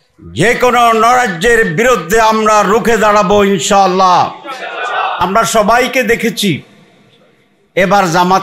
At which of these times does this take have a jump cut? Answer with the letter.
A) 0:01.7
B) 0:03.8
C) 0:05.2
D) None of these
C